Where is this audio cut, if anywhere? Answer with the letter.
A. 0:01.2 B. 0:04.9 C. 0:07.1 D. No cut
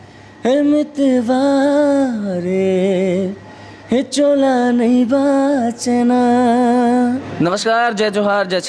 C